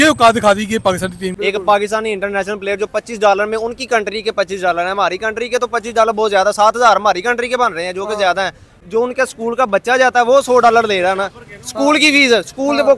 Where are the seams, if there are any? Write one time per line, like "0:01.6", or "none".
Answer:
0:01.3
0:08.7